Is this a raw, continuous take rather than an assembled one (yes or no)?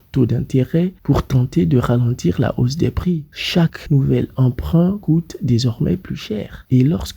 no